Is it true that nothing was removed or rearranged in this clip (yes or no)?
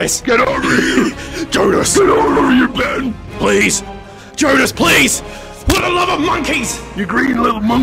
yes